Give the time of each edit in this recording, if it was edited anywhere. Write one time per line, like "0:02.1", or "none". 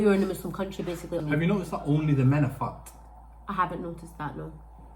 0:01.2